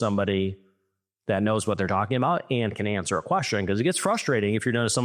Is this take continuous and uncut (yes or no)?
yes